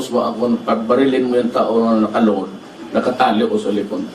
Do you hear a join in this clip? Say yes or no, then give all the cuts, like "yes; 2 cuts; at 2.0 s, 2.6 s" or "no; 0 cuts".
no; 0 cuts